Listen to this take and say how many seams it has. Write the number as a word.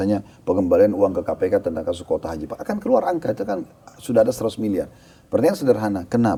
zero